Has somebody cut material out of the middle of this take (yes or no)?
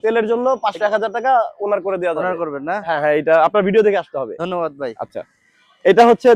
no